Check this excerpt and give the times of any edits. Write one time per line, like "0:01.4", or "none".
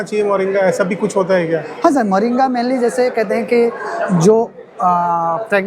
none

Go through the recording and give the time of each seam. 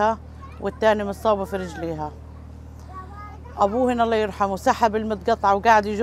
none

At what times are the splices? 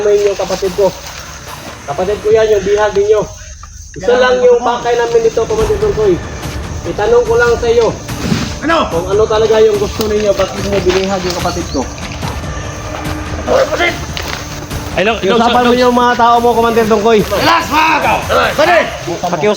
none

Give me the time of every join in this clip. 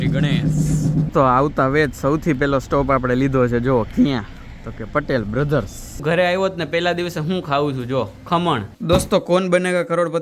0:01.1
0:06.0
0:08.7

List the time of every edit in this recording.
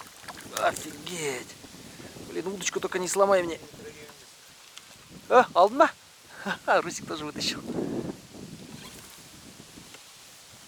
none

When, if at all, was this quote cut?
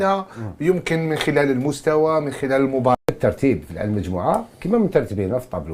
0:03.0

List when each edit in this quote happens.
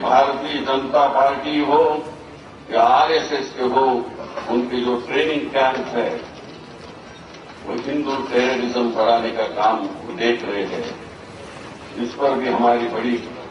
none

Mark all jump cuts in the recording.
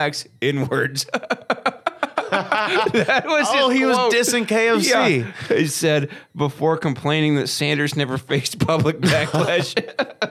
none

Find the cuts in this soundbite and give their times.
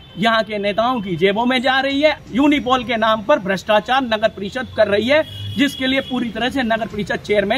0:02.2

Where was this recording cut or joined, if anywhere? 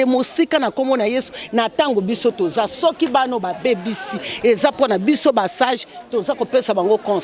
none

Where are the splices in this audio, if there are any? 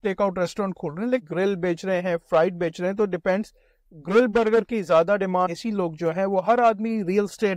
0:01.2
0:05.5

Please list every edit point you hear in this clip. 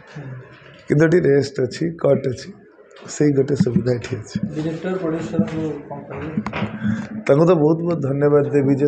none

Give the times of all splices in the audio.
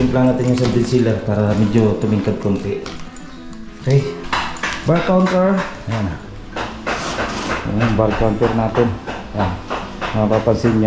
0:04.2

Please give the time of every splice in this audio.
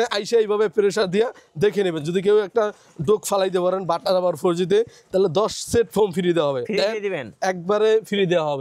none

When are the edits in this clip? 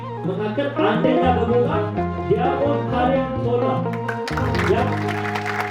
none

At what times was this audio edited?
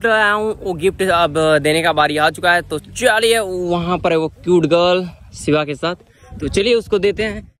none

